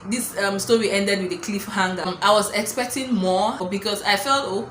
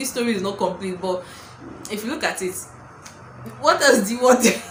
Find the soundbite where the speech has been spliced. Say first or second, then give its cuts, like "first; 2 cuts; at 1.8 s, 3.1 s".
first; 2 cuts; at 2.1 s, 3.6 s